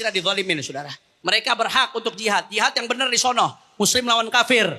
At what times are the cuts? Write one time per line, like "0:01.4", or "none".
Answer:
none